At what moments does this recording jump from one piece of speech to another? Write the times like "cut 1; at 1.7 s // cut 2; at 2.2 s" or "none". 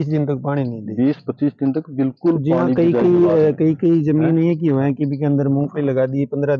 none